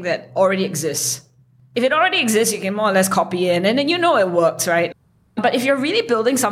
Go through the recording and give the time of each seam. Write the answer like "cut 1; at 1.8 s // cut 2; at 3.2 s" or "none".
cut 1; at 5.2 s